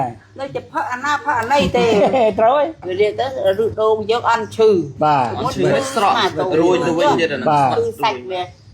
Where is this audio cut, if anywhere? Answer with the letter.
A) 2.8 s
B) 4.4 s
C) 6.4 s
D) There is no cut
A